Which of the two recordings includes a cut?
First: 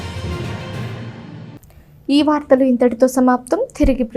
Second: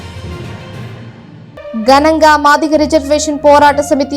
second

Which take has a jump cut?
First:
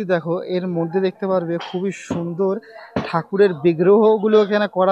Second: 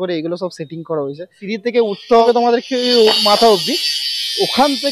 second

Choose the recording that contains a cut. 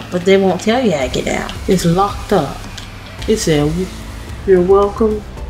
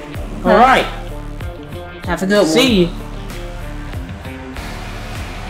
second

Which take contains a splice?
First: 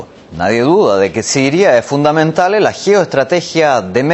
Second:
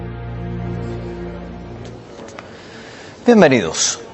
first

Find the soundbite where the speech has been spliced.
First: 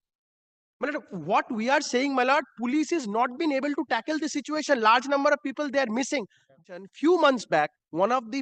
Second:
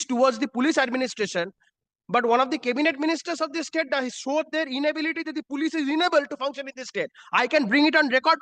first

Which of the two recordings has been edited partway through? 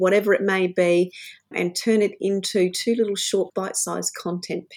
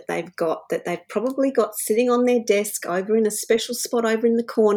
first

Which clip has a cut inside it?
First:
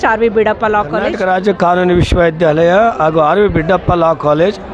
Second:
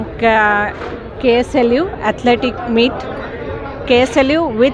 first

